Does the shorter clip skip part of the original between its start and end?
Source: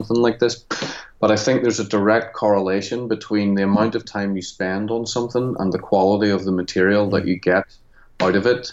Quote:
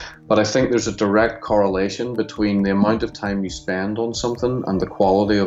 no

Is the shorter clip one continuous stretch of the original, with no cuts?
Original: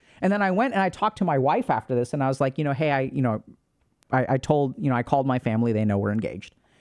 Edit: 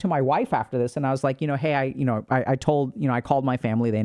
no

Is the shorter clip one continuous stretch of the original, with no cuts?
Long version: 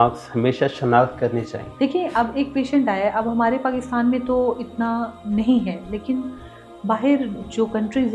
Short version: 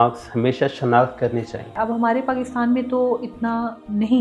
no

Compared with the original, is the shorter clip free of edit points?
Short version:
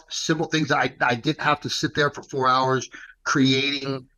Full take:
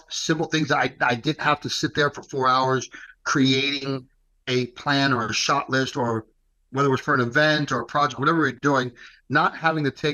yes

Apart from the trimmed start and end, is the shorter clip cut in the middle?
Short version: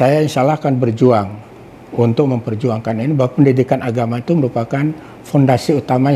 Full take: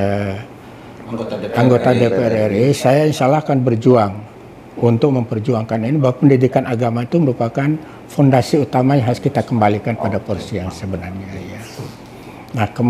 no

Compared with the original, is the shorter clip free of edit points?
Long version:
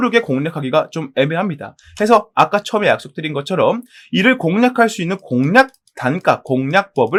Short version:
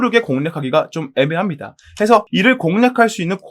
no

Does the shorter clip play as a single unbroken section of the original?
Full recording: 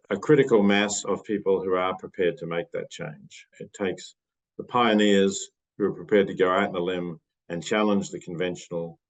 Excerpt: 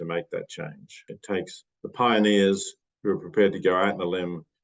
no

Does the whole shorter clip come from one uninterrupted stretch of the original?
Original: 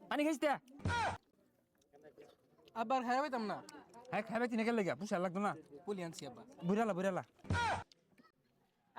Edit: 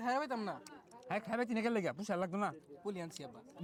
yes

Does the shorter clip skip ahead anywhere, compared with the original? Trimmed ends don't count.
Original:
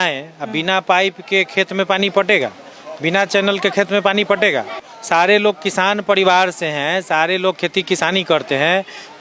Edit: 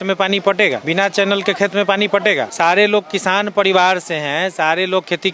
yes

